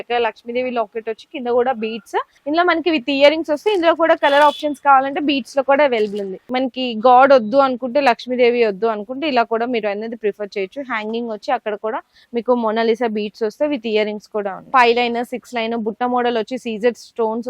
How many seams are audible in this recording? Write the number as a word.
three